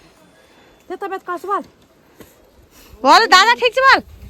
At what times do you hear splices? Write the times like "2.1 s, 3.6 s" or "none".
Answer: none